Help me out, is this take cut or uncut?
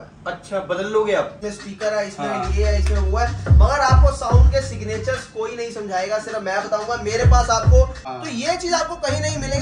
cut